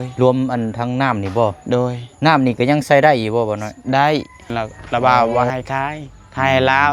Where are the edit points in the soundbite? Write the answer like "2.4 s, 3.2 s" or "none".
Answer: 4.5 s